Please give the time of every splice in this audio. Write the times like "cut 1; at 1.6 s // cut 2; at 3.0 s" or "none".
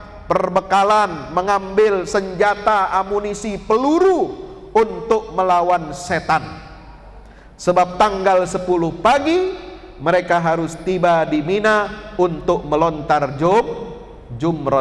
none